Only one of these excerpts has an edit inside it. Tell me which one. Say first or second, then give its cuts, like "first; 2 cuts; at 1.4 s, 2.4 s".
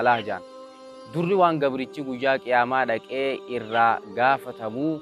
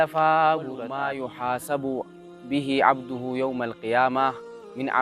second; 1 cut; at 1.0 s